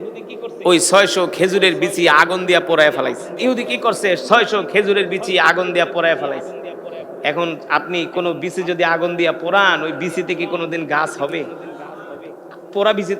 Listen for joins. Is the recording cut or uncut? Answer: cut